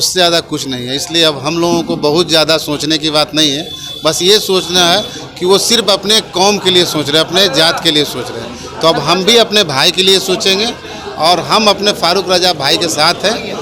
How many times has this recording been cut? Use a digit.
0